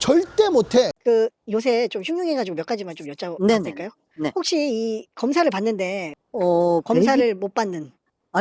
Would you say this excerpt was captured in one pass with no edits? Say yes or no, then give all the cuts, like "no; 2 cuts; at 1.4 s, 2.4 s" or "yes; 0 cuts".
no; 2 cuts; at 1.0 s, 6.1 s